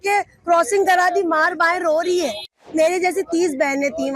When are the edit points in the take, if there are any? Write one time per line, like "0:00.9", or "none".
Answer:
0:02.6